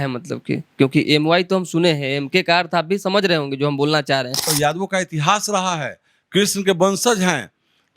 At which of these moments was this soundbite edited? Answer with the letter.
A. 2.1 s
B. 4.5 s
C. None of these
B